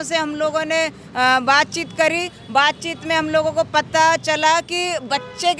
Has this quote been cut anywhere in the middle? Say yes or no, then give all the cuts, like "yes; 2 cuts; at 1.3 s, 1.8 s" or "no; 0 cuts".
no; 0 cuts